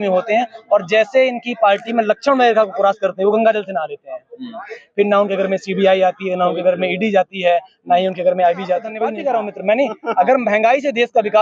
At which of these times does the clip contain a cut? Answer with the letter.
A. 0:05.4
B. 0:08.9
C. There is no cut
B